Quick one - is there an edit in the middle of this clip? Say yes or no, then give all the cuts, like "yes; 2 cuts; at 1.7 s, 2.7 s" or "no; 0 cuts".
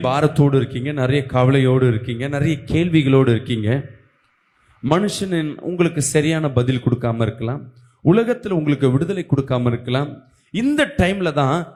no; 0 cuts